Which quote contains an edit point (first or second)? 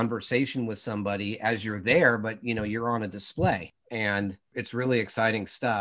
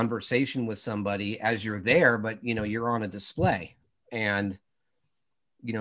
first